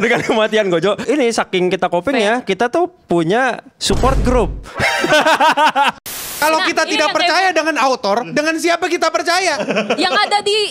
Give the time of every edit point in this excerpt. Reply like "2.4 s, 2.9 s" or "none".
6.0 s